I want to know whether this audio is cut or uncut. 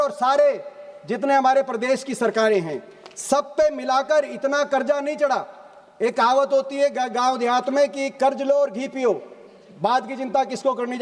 uncut